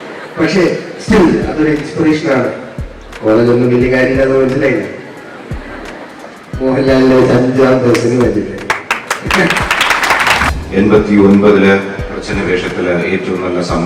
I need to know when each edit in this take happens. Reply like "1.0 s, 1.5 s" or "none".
10.5 s